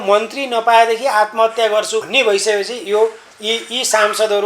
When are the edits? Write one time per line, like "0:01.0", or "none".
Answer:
0:02.1